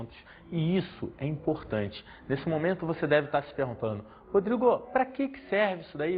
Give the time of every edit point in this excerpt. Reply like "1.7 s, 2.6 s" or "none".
1.1 s